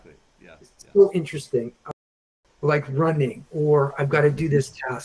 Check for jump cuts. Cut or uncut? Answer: cut